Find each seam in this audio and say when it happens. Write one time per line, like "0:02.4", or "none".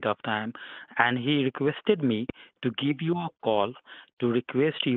none